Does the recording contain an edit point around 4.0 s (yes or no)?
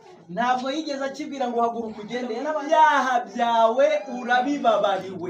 no